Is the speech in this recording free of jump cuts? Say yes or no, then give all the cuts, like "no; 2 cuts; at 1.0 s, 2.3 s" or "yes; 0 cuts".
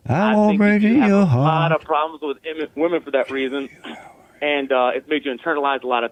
yes; 0 cuts